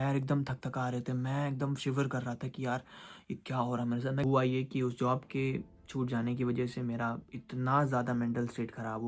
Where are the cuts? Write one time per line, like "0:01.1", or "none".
0:04.2